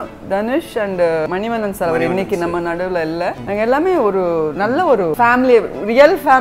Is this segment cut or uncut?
cut